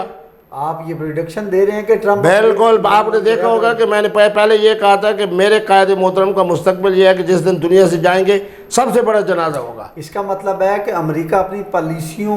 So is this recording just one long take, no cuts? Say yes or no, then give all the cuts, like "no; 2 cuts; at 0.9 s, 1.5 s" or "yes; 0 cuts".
yes; 0 cuts